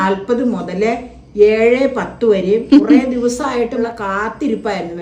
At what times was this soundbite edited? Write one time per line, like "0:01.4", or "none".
0:02.6
0:03.8